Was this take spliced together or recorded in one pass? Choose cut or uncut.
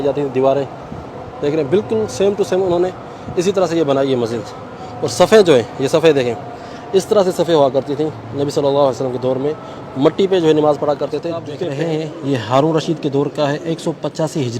cut